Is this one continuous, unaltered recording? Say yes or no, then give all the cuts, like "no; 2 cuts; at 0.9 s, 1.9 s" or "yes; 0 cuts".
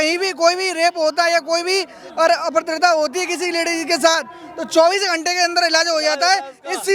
yes; 0 cuts